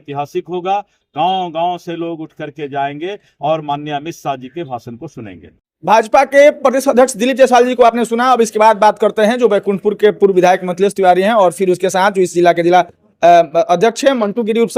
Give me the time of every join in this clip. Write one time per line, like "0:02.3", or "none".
none

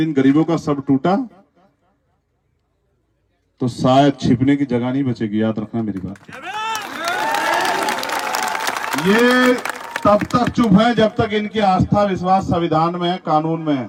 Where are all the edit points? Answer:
none

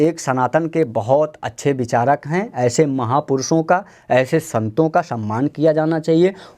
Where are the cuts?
none

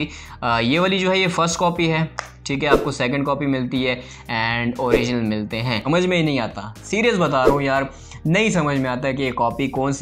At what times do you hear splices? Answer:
0:05.8

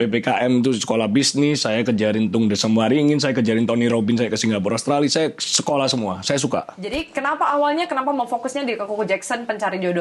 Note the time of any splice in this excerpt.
0:06.9

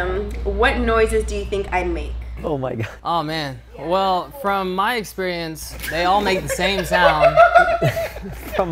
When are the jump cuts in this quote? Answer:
0:02.4

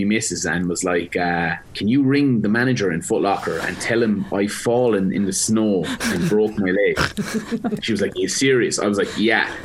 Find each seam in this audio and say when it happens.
0:01.6
0:07.8

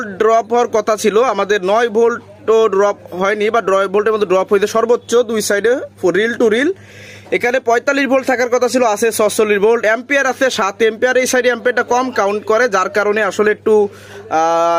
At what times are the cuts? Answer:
none

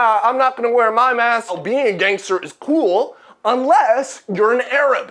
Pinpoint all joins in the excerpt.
0:01.6

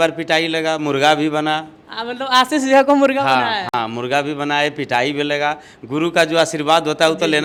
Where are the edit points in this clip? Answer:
none

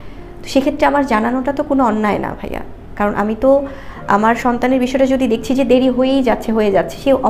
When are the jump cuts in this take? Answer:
none

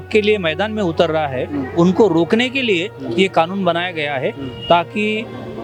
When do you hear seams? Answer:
none

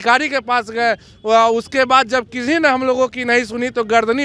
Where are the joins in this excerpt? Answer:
none

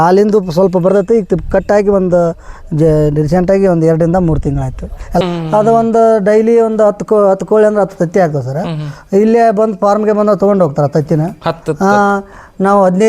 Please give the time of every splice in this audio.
0:05.2

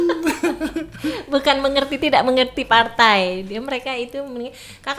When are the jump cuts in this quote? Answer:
none

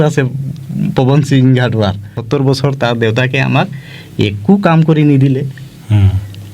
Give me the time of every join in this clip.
0:02.2

